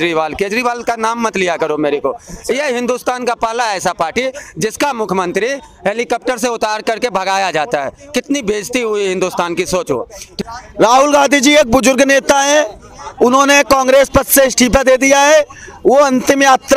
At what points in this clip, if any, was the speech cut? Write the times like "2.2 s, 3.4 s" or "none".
10.3 s